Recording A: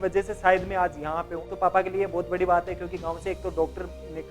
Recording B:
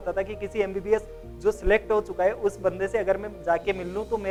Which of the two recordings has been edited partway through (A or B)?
A